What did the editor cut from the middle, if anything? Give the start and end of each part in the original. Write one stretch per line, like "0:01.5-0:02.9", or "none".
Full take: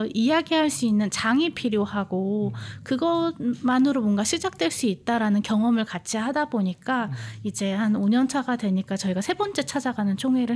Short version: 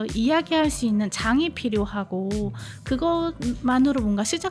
none